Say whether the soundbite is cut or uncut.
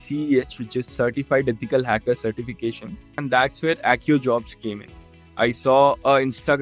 cut